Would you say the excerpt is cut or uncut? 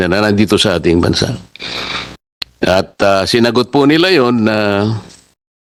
uncut